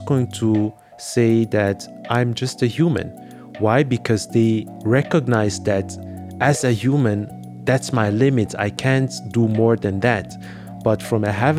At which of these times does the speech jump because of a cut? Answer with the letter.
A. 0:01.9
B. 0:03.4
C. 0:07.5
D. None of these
D